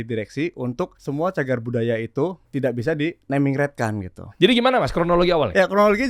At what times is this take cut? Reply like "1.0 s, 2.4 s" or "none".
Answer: 1.0 s, 2.4 s, 4.2 s